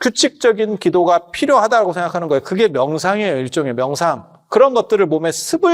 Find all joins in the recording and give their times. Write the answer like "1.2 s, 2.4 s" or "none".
4.4 s